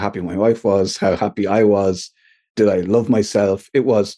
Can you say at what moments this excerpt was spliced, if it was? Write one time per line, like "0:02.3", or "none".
0:02.5